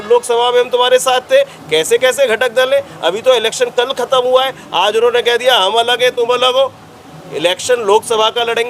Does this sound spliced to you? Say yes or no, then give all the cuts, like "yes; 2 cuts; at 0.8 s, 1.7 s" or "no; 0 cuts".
no; 0 cuts